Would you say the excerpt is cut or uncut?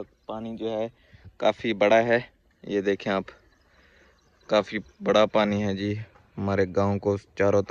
uncut